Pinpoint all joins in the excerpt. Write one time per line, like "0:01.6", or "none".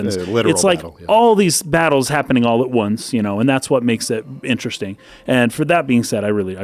none